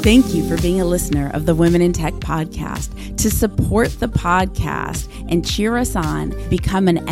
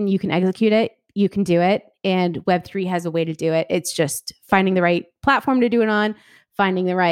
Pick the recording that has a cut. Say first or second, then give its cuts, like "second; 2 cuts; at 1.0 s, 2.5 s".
second; 1 cut; at 4.4 s